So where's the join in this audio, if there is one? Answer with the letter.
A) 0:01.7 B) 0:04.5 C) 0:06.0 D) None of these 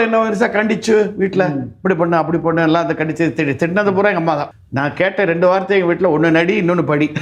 B